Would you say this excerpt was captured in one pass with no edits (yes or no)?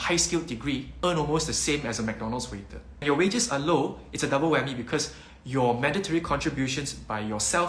no